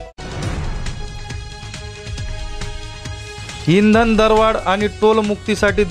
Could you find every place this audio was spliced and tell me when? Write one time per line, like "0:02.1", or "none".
0:00.8
0:01.8